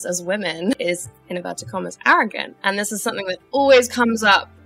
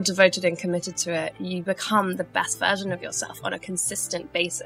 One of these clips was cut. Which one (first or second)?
first